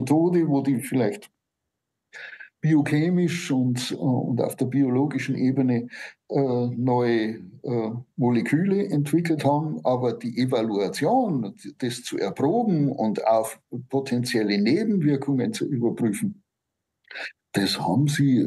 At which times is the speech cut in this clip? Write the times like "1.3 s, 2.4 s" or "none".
none